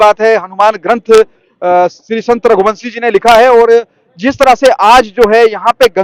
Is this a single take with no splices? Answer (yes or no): yes